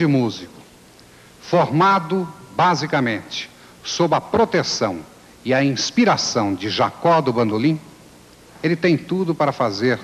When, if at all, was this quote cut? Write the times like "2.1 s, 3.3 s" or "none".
7.8 s